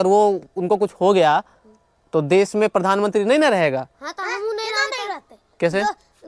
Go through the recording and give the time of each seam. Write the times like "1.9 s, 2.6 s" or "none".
none

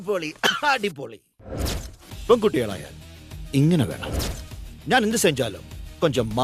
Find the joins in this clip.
none

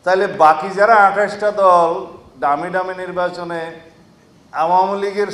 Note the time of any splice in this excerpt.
none

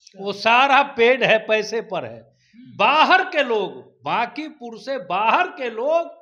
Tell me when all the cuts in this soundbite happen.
none

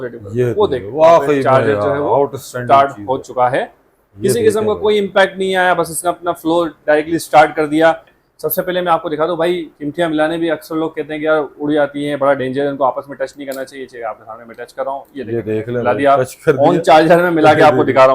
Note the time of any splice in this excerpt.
8.1 s

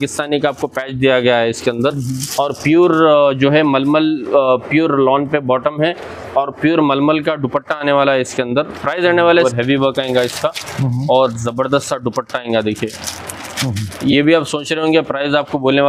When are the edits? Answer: 9.3 s

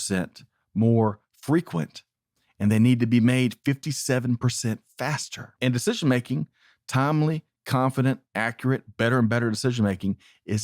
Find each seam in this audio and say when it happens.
5.6 s

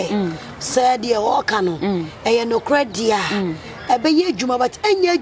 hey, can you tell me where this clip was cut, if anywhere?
none

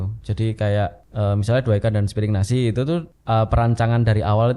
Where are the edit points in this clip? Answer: 1.0 s, 3.1 s

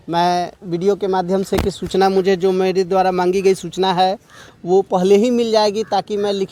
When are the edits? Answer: none

